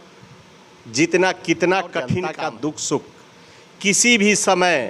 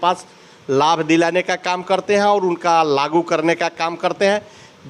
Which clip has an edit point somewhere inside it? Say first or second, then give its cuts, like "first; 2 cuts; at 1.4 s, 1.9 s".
first; 1 cut; at 2.3 s